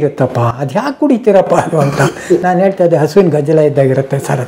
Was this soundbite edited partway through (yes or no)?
no